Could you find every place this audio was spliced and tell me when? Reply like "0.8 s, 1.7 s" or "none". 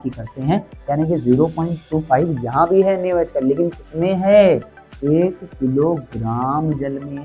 none